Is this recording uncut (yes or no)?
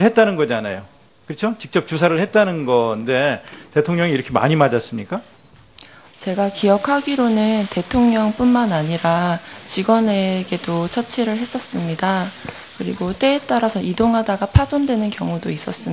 yes